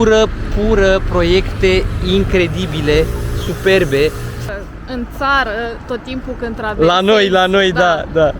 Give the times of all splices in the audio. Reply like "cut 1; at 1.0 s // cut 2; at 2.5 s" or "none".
cut 1; at 4.4 s